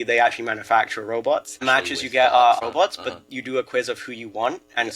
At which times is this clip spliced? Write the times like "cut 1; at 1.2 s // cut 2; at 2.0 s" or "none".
cut 1; at 1.6 s // cut 2; at 2.6 s

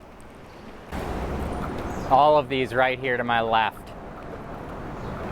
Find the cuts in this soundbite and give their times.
cut 1; at 0.9 s

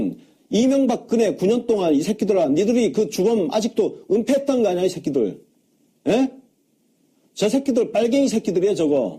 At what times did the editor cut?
none

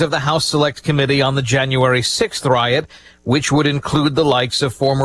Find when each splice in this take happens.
none

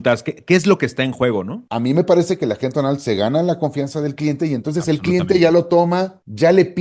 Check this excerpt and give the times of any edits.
cut 1; at 1.6 s

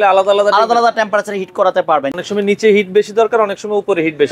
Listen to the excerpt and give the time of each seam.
cut 1; at 2.1 s

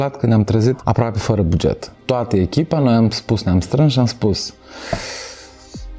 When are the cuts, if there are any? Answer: cut 1; at 0.8 s // cut 2; at 2.0 s

